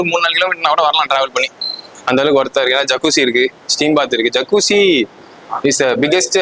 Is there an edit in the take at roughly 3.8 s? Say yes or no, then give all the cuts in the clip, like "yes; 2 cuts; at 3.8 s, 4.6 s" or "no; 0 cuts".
no; 0 cuts